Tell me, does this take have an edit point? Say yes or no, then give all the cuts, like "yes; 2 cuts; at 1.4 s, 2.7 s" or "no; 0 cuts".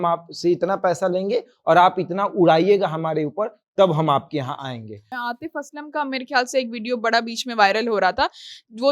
yes; 1 cut; at 5.2 s